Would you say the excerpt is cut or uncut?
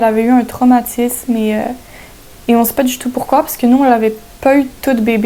uncut